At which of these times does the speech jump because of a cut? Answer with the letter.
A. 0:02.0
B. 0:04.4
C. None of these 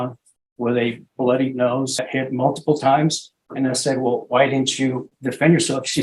A